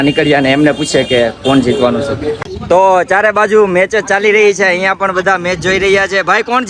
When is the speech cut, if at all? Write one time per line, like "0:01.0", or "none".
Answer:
0:02.4